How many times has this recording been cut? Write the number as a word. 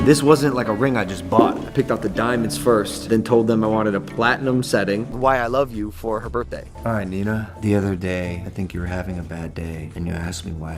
one